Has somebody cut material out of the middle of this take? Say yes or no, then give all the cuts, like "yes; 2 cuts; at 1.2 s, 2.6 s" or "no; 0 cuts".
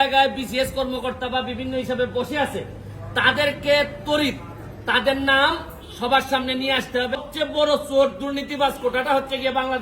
yes; 1 cut; at 7.2 s